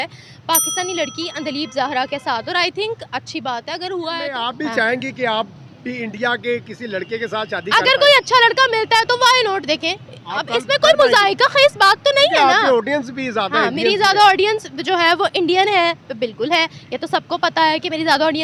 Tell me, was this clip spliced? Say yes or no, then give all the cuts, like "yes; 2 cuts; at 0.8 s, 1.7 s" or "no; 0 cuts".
yes; 1 cut; at 4.4 s